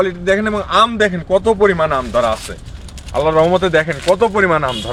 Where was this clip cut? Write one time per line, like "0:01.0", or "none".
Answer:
none